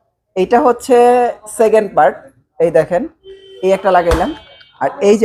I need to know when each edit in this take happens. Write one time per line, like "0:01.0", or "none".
none

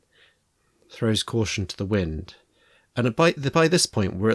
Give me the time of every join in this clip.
none

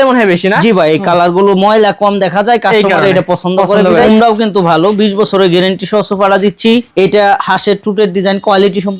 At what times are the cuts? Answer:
0:04.1
0:06.9

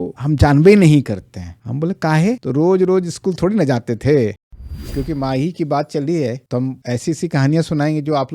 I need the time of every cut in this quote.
0:04.4

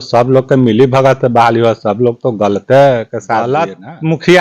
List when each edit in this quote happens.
0:03.5

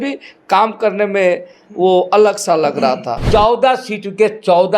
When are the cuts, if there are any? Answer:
0:03.1

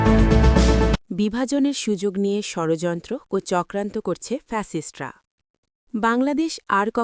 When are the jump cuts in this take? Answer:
none

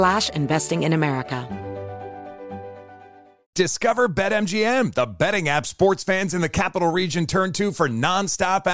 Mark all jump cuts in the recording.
0:01.4

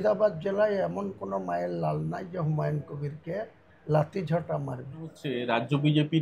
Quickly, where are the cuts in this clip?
0:05.3

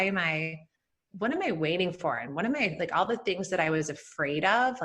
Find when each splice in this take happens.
none

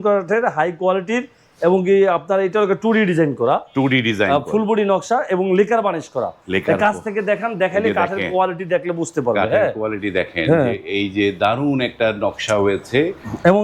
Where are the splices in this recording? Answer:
none

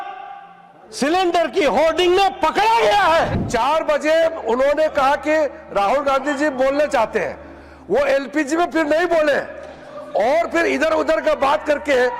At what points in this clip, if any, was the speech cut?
0:03.3

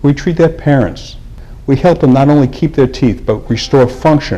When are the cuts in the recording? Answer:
none

